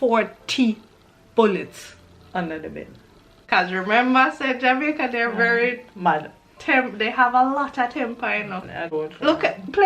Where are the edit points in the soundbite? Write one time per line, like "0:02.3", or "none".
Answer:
0:03.4
0:08.9